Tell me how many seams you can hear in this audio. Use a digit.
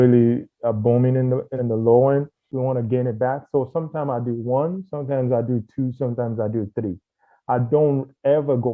2